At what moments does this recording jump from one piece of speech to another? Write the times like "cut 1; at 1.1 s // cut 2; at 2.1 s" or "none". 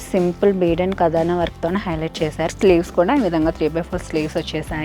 cut 1; at 2.5 s